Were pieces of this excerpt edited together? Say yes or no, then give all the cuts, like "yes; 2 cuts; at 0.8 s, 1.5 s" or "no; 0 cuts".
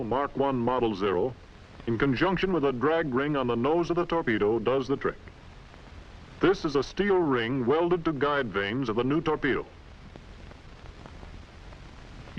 no; 0 cuts